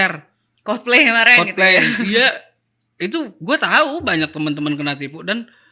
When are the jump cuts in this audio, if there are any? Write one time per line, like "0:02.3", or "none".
none